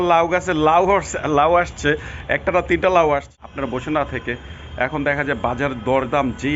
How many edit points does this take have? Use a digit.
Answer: 1